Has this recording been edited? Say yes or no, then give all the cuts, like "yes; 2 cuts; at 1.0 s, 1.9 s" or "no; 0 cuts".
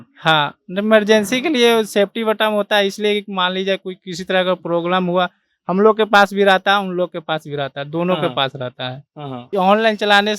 yes; 1 cut; at 9.5 s